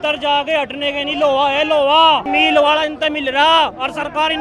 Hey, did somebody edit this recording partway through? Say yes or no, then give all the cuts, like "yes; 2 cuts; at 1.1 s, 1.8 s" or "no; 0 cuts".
no; 0 cuts